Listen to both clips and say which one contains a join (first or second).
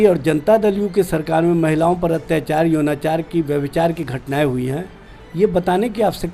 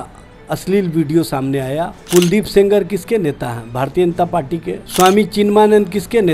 second